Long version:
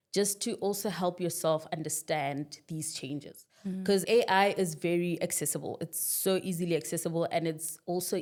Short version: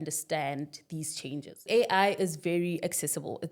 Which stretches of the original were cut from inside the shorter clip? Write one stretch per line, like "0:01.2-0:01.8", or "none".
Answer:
0:03.4-0:04.0